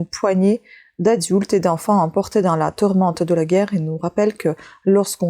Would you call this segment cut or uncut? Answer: uncut